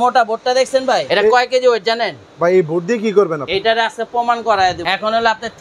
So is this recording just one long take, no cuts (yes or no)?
no